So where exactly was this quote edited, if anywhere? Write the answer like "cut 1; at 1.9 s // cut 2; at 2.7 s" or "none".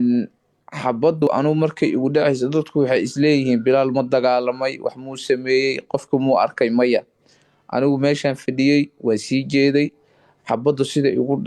cut 1; at 1.2 s

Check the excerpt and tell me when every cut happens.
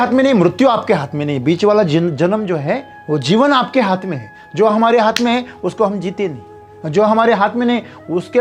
none

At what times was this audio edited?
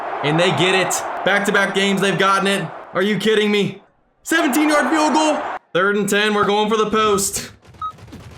cut 1; at 1.0 s // cut 2; at 2.8 s // cut 3; at 3.8 s // cut 4; at 5.5 s

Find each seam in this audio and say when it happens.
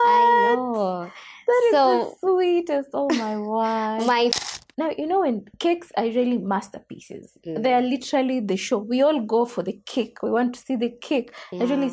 cut 1; at 4.3 s

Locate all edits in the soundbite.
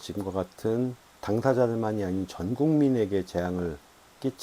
cut 1; at 1.1 s

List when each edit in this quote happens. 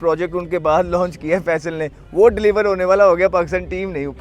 none

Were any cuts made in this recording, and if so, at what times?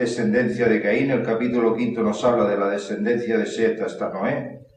cut 1; at 2.9 s

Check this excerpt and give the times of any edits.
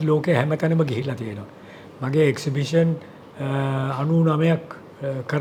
none

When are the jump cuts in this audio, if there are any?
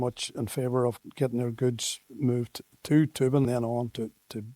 cut 1; at 1.0 s // cut 2; at 3.5 s

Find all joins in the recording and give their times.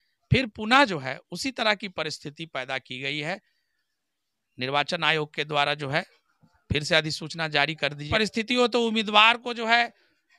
cut 1; at 8.0 s

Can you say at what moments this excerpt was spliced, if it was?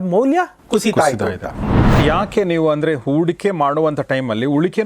cut 1; at 2.0 s

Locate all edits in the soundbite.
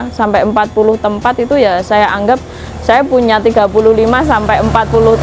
none

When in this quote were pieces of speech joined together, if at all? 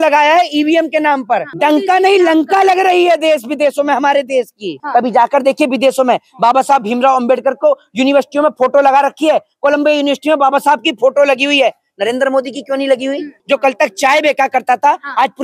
cut 1; at 1.5 s // cut 2; at 4.7 s // cut 3; at 13.3 s

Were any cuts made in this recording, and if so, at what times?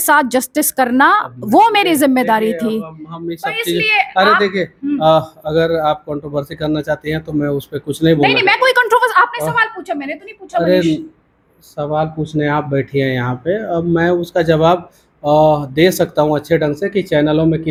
none

